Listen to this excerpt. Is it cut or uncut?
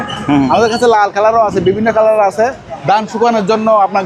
cut